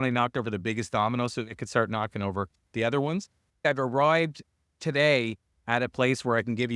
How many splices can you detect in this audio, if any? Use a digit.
1